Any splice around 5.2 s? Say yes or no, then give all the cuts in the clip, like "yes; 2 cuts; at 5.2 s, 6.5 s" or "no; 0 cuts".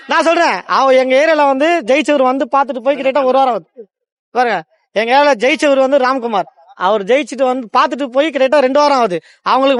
no; 0 cuts